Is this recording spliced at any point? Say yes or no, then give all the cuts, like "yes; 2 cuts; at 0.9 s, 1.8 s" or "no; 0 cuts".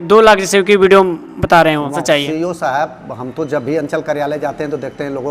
yes; 1 cut; at 2.0 s